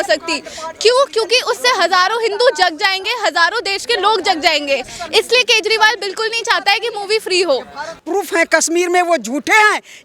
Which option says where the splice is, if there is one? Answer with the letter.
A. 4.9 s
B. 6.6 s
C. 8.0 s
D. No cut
C